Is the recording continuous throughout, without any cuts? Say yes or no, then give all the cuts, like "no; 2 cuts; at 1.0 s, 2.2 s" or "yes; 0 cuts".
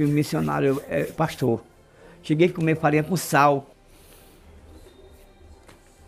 no; 1 cut; at 3.7 s